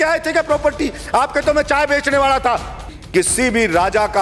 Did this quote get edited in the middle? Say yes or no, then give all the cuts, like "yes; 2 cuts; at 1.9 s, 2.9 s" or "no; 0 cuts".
yes; 1 cut; at 2.9 s